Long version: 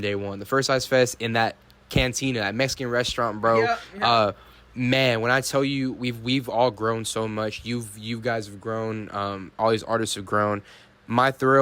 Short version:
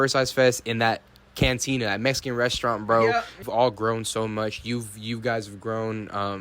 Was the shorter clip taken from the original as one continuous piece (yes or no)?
no